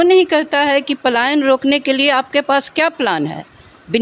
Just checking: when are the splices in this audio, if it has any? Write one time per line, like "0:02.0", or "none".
none